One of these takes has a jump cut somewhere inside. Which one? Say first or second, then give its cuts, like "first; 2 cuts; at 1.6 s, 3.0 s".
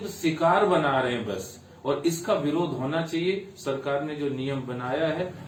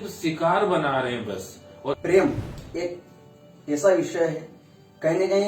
second; 1 cut; at 2.0 s